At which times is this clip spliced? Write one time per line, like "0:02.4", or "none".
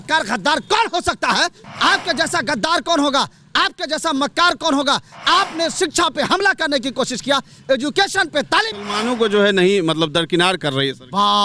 0:01.6
0:08.7